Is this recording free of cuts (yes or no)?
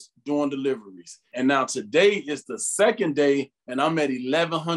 no